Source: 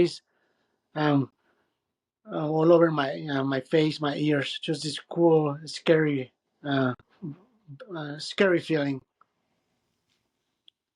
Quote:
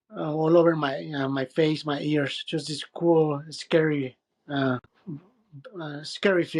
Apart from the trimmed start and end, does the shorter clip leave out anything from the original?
no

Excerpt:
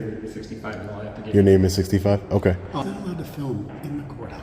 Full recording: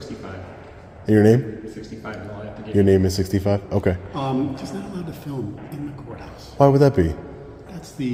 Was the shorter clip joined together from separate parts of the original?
yes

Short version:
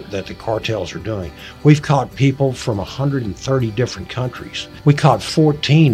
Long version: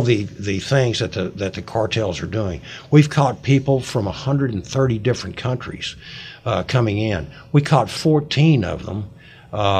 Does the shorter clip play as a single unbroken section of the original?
no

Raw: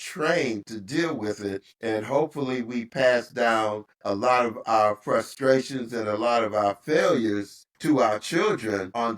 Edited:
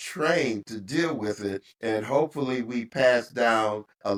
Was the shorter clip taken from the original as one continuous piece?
yes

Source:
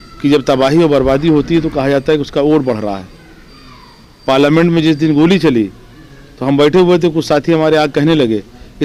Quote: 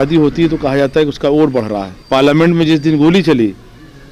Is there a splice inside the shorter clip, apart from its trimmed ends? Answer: yes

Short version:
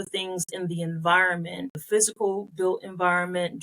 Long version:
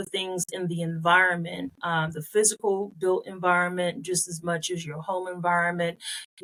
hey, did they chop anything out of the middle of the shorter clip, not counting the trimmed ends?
yes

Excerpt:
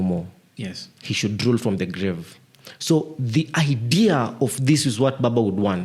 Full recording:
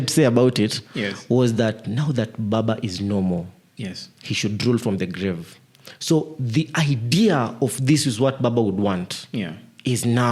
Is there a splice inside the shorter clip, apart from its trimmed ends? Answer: no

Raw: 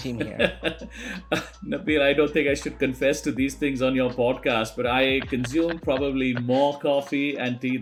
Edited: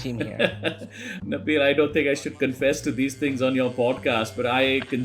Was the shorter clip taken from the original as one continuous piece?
no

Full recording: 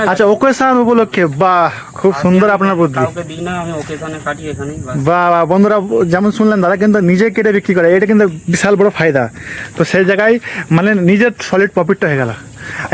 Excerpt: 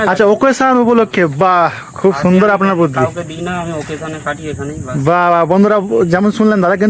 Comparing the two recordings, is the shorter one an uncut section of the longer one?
yes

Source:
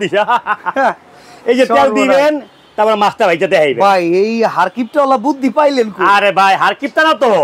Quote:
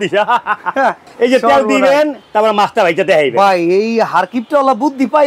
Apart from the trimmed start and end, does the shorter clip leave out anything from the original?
yes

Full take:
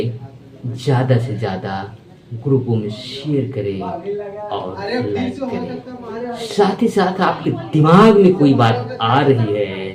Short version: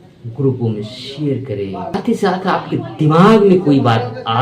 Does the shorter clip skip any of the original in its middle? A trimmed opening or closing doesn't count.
yes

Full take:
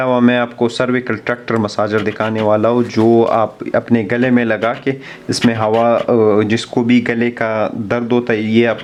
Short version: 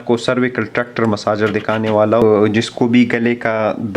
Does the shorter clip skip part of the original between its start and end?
yes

